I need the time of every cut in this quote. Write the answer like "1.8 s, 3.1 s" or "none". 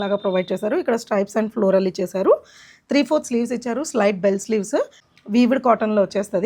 5.0 s